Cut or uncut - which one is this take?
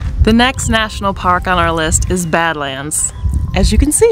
uncut